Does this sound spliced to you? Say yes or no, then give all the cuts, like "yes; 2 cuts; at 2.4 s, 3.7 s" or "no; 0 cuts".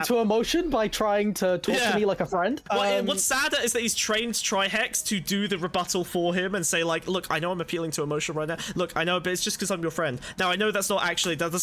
yes; 1 cut; at 2.6 s